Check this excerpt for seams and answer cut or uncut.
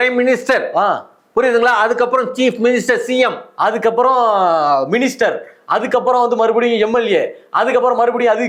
uncut